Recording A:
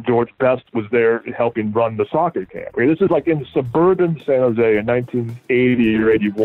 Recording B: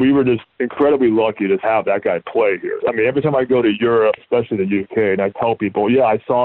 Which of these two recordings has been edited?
B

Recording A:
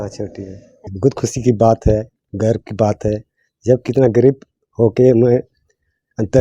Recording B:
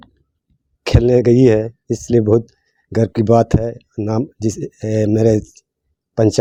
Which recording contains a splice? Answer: A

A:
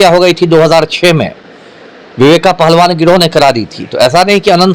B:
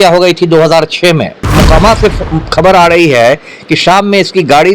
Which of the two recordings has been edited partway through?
B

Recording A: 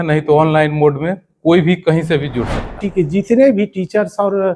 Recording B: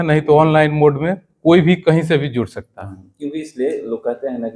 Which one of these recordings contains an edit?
A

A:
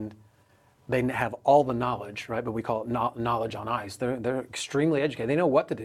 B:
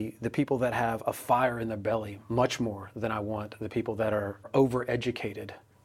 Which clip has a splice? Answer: B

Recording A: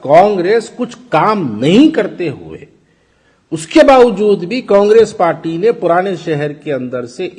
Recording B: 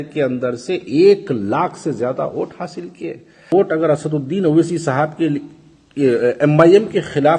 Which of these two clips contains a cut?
B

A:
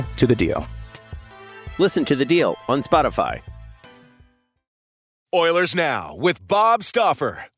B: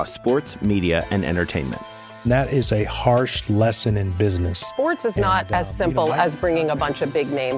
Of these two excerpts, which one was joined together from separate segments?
A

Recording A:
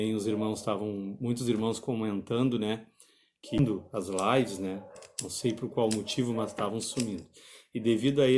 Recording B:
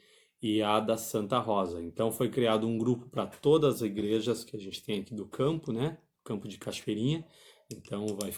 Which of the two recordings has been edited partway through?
A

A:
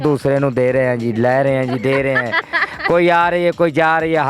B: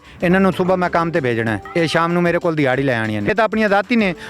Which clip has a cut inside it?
B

